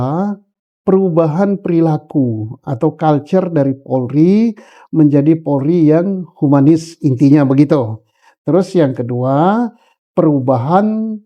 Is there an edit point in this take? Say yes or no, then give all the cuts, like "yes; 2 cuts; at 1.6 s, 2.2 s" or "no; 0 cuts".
no; 0 cuts